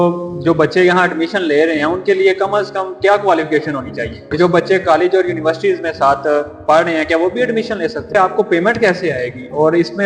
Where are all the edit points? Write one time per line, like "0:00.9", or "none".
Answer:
0:04.3
0:08.1